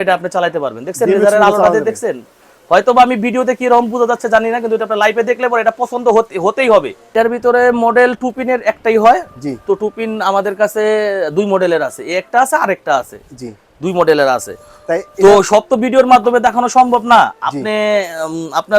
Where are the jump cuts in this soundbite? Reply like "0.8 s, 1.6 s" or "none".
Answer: 7.0 s